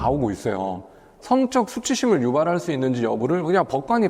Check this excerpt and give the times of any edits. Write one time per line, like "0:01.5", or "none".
0:01.0